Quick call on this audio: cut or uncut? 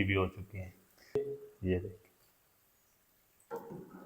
cut